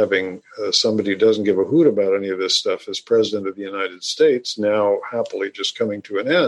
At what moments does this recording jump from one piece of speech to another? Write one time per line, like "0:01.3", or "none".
none